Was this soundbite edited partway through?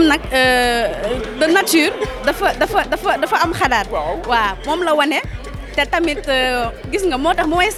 no; 0 cuts

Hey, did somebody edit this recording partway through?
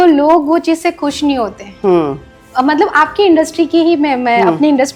no; 0 cuts

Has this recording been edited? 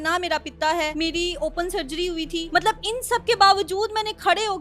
yes; 2 cuts; at 0.9 s, 2.5 s

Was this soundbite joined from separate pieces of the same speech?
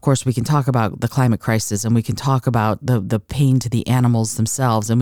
no; 0 cuts

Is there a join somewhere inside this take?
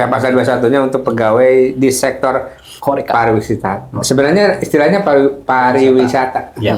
no; 0 cuts

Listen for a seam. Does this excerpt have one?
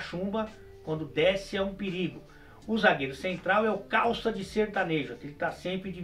no; 0 cuts

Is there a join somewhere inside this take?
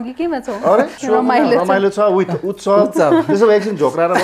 yes; 1 cut; at 1.0 s

